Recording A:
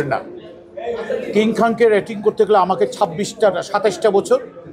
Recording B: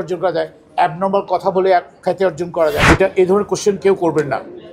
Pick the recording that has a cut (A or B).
B